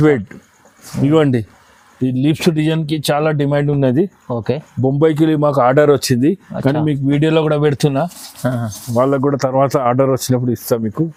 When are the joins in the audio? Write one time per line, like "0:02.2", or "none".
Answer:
none